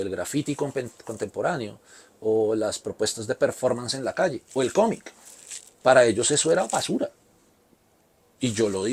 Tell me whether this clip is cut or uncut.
uncut